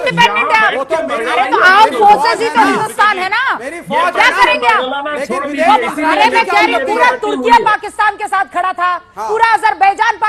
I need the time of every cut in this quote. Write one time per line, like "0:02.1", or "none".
none